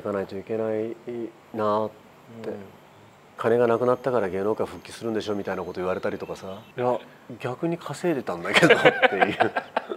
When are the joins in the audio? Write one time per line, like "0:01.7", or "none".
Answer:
0:03.4
0:06.5